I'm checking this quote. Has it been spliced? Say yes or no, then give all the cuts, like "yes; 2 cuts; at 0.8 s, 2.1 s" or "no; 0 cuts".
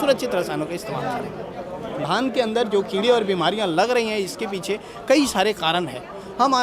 yes; 1 cut; at 2.0 s